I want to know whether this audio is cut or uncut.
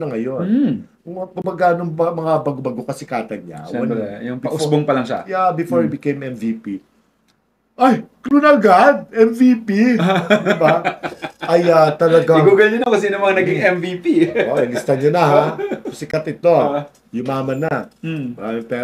uncut